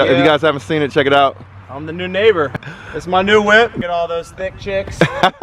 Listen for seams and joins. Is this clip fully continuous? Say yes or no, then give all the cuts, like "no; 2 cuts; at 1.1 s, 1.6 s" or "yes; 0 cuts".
no; 2 cuts; at 2.6 s, 3.8 s